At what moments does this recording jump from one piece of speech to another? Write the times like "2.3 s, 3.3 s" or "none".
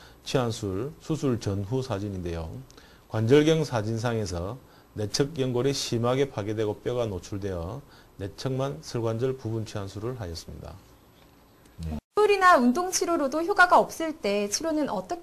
12.1 s